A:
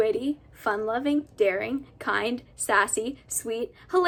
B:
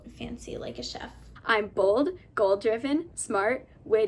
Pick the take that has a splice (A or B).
B